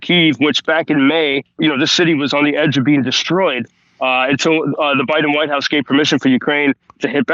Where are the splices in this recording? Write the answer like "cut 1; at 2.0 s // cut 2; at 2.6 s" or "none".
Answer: cut 1; at 1.6 s